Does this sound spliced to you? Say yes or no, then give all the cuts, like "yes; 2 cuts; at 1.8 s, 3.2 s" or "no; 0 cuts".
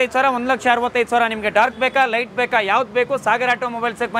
no; 0 cuts